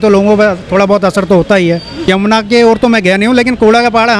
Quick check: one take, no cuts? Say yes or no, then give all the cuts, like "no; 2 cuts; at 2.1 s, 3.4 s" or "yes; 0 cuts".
no; 1 cut; at 2.1 s